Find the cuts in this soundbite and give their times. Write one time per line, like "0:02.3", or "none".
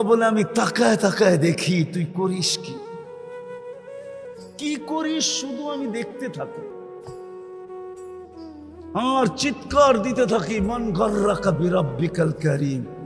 0:02.5
0:04.1